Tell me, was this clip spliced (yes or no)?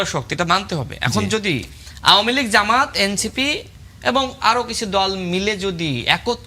no